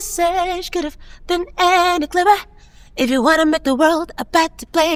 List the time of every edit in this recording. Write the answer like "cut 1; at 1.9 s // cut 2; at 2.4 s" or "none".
none